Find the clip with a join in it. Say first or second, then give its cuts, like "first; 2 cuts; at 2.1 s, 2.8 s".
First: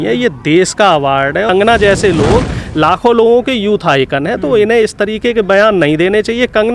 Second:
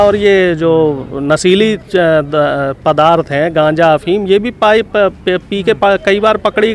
first; 1 cut; at 1.5 s